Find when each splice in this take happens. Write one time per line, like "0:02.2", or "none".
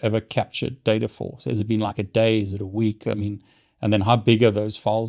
none